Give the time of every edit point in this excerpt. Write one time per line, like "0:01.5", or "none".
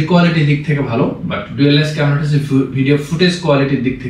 none